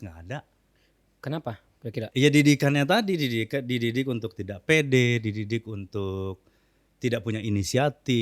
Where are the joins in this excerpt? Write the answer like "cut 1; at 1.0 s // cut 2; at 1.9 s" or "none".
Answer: cut 1; at 2.1 s